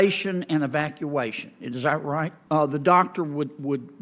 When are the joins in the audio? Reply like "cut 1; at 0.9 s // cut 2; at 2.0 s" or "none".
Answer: cut 1; at 2.4 s